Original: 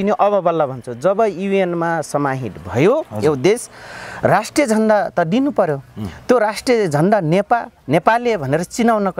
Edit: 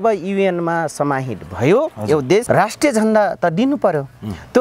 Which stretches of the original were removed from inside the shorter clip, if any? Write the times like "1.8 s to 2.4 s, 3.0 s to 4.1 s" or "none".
3.6 s to 4.2 s

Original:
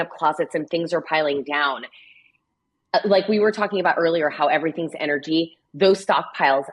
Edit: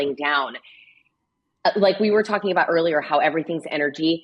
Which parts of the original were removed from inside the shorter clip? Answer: none

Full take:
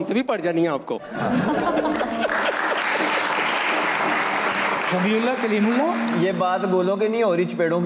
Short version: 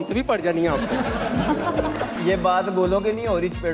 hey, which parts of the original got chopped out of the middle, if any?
2.2 s to 6.1 s

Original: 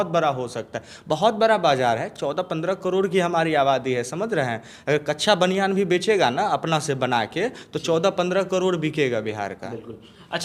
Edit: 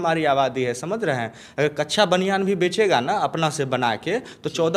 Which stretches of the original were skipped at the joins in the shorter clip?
none

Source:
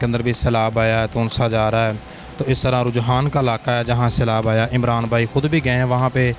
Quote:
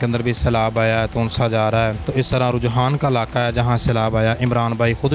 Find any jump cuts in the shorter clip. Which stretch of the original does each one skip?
2.0 s to 2.3 s

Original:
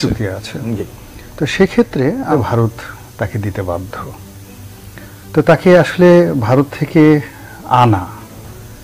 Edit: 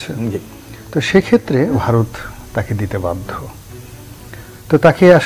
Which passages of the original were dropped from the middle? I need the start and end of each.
2.2 s to 2.4 s

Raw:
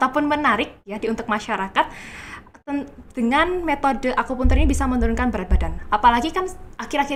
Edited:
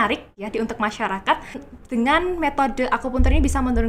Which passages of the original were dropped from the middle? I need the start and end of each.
2.2 s to 3.0 s

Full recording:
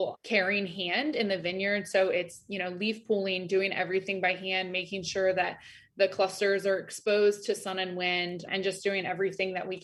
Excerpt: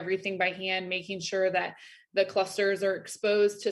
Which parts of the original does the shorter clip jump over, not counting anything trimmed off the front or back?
none

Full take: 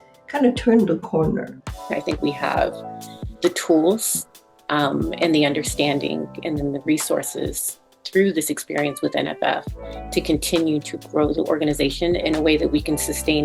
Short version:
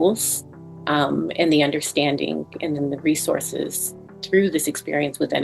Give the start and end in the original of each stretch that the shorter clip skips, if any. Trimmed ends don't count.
none

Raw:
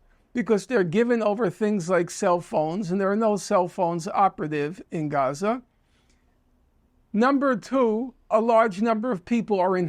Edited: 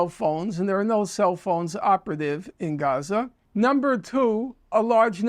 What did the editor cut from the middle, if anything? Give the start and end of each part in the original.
5.7 s to 7.0 s

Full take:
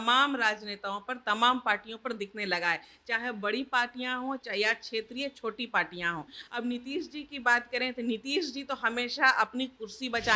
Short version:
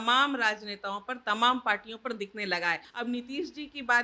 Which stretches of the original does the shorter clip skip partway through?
2.9 s to 6.4 s

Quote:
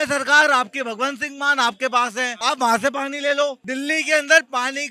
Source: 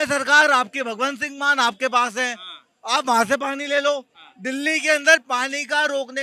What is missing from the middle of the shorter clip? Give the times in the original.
2.3 s to 2.8 s, 4.1 s to 4.4 s

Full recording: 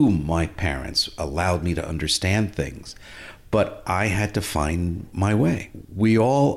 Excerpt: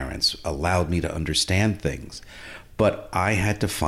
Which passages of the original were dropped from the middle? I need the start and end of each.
none

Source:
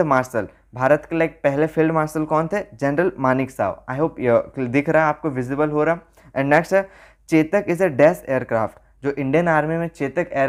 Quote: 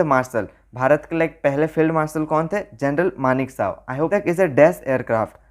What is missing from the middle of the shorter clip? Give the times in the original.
4.1 s to 7.5 s

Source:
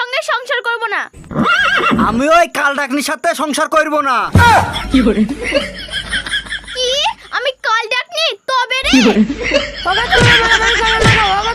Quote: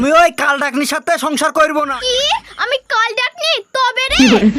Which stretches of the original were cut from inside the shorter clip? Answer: 4.1 s to 6.6 s

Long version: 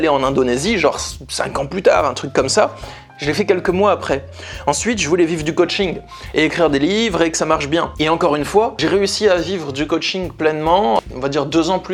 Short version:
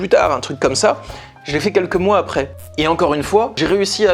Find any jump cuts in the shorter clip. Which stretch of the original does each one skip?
4.4 s to 7.9 s

